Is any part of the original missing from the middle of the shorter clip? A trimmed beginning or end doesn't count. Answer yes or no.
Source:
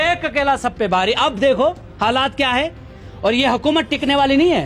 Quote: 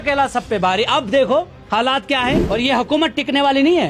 yes